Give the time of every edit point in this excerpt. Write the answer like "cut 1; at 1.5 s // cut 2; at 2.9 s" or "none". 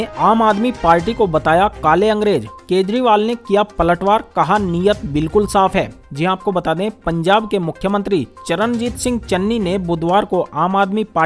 none